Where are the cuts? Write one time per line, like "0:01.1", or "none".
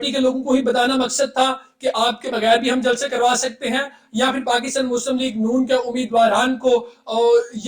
none

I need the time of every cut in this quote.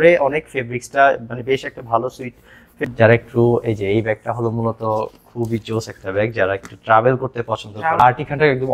0:02.7
0:08.0

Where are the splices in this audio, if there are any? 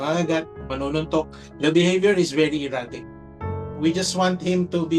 0:03.4

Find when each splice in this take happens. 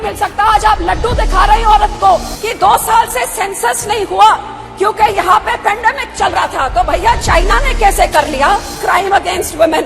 0:02.4
0:08.8

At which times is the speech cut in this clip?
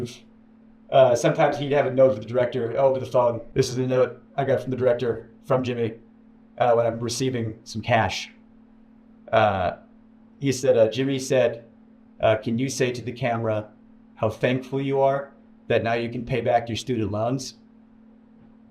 0:03.4

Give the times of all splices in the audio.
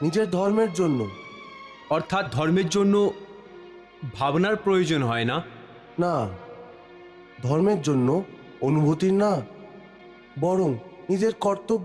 none

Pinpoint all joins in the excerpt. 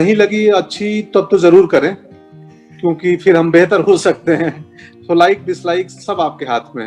none

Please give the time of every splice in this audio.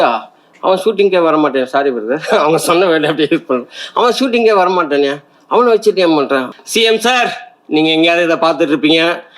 0:06.5

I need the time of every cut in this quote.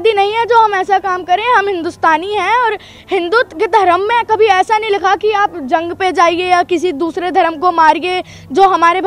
none

